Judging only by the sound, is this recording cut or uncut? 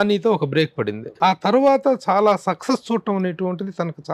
cut